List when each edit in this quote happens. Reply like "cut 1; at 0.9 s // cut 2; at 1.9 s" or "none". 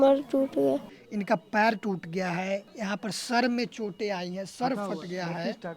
cut 1; at 1.0 s // cut 2; at 2.7 s